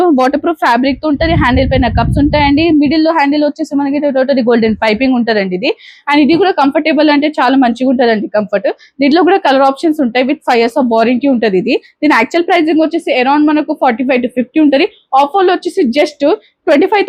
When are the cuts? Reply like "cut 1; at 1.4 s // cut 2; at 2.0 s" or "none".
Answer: none